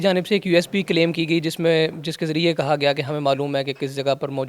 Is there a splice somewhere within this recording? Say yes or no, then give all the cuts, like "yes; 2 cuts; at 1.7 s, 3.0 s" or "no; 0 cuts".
no; 0 cuts